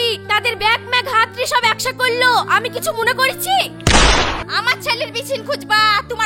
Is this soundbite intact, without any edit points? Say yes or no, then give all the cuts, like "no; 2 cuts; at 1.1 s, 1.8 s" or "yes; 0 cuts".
yes; 0 cuts